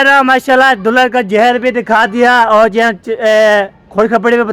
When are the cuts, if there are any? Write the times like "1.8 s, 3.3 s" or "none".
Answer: none